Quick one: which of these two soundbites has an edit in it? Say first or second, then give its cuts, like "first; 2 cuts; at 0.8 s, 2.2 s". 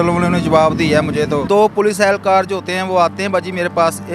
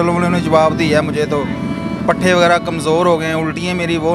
first; 1 cut; at 1.4 s